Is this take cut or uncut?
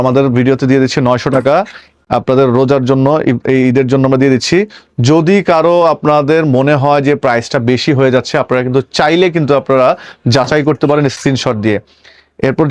uncut